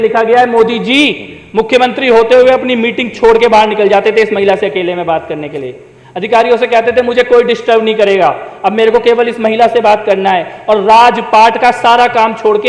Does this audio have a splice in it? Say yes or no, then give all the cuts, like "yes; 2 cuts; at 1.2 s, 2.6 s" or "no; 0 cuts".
no; 0 cuts